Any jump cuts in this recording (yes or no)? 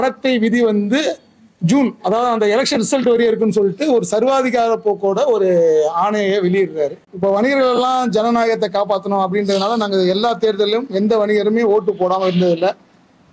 yes